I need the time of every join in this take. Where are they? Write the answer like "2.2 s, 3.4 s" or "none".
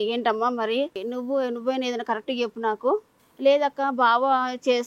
1.0 s, 3.2 s